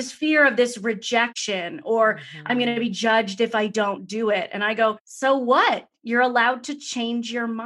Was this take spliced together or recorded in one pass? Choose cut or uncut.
cut